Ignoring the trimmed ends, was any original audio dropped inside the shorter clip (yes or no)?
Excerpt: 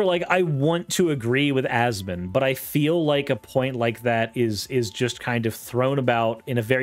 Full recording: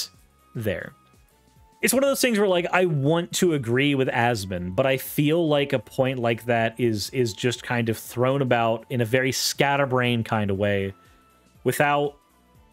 no